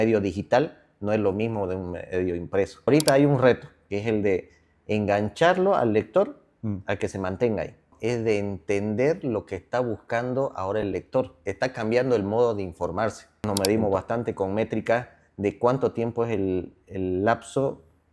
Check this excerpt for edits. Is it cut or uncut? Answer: cut